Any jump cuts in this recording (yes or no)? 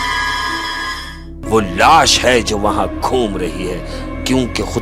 yes